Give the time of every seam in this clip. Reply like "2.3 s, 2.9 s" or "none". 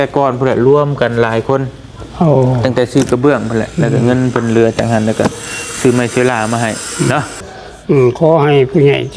7.5 s